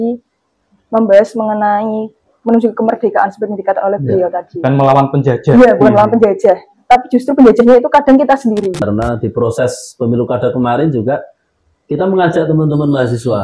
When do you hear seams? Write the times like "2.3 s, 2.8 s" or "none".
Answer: 8.8 s